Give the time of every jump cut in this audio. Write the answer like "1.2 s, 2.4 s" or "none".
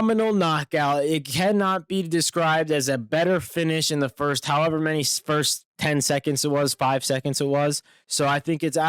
none